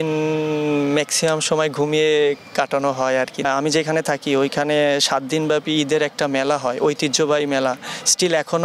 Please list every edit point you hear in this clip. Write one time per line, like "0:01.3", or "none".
0:03.5